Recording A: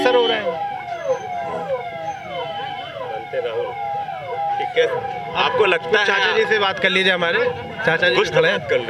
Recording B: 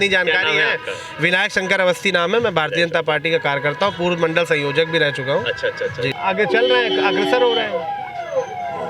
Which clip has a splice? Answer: B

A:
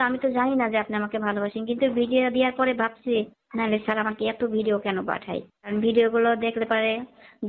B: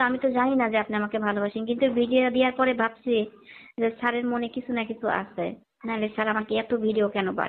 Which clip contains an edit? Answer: A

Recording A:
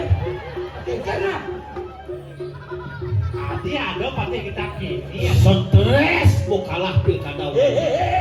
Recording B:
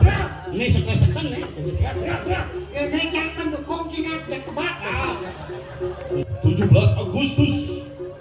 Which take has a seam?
B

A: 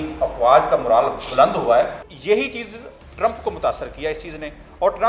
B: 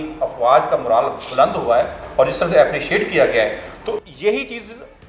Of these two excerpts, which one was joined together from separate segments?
A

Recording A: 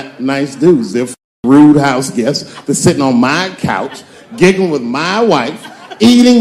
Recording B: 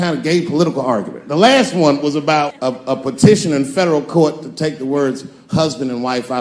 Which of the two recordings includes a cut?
B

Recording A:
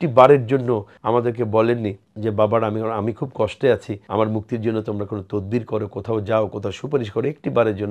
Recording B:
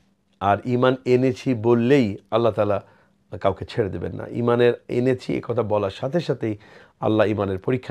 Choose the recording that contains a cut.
A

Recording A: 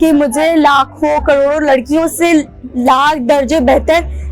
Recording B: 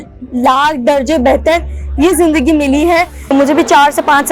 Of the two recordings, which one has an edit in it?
B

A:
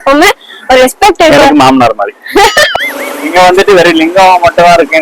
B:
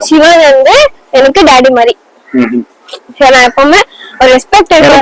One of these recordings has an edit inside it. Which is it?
A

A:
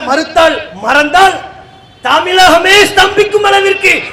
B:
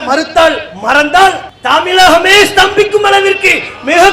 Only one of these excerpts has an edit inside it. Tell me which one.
B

